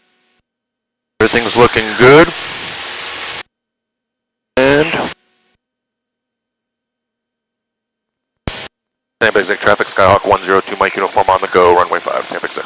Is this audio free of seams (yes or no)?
yes